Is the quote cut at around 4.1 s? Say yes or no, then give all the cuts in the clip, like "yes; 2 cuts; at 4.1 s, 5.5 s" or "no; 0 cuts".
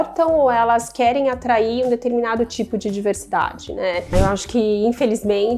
yes; 1 cut; at 4.1 s